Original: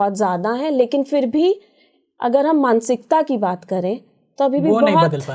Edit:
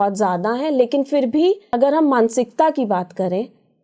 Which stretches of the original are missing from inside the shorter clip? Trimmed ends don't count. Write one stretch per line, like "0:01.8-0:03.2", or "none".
0:01.7-0:02.2